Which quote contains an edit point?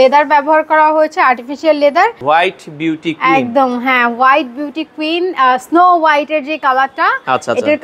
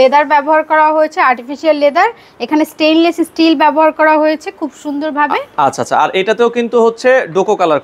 first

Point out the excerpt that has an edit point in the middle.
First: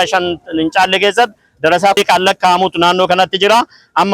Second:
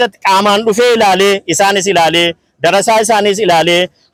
first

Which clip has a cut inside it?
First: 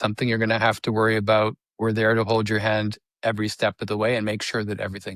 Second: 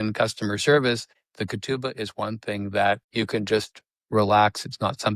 second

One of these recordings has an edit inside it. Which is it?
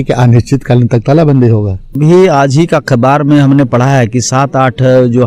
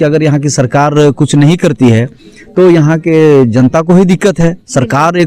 first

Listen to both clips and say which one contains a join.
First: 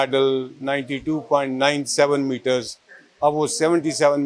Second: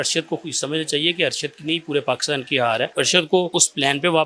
second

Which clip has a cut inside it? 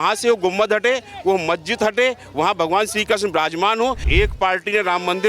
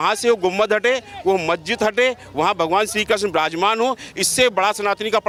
first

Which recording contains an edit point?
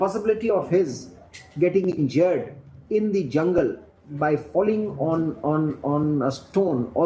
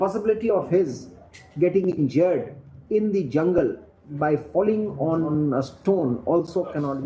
second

